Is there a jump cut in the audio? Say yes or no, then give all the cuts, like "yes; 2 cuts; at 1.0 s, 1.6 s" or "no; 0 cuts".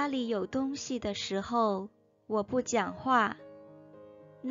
no; 0 cuts